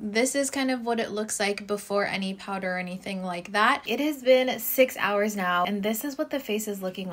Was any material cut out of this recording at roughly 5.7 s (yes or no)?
yes